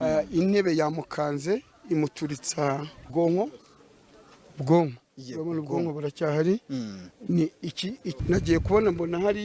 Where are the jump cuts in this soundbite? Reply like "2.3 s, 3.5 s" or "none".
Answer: 2.9 s, 8.2 s